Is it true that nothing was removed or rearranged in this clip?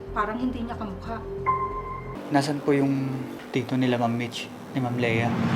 no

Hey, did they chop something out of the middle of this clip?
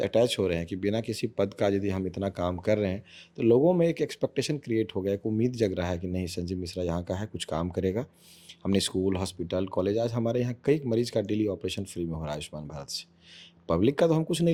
no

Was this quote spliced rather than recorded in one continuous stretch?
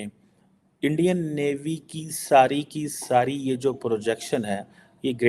no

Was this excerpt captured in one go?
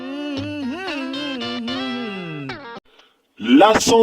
no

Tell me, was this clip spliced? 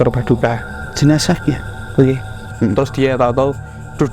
yes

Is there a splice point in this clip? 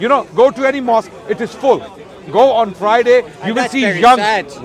no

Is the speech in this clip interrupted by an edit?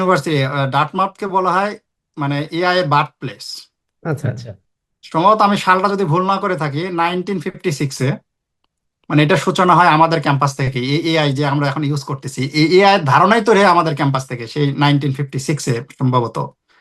no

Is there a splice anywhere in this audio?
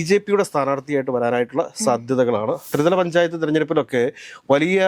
yes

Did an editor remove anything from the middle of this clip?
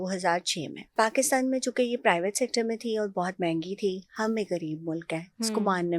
yes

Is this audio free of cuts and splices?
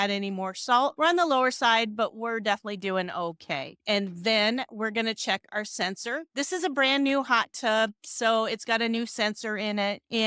yes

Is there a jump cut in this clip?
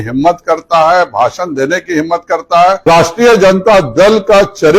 yes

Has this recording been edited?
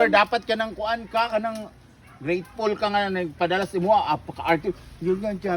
no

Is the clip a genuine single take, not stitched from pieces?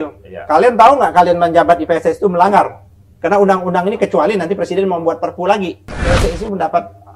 no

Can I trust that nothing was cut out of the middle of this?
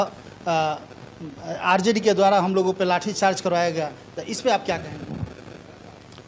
yes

